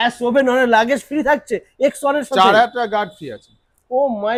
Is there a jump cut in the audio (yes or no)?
no